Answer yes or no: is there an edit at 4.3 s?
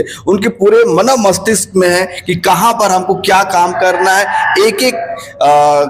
no